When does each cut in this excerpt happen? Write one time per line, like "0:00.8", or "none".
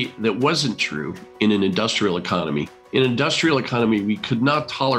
none